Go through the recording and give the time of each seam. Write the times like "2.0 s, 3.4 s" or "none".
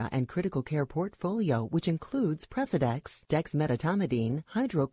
none

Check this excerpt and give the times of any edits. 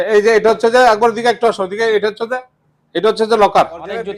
none

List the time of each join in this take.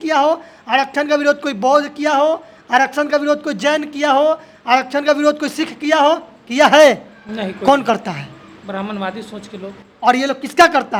none

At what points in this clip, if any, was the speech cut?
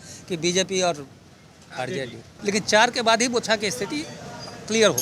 2.3 s

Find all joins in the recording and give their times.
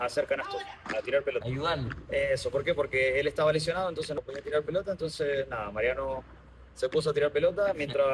1.5 s, 4.1 s

